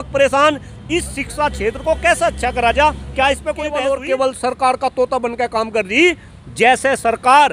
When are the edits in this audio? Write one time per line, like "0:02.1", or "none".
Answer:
0:03.5